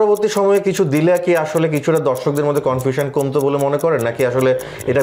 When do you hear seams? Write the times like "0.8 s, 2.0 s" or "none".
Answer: none